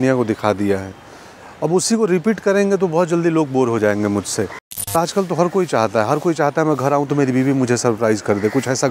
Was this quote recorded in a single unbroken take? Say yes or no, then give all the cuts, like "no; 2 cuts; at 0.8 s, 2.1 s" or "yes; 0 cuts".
no; 1 cut; at 4.9 s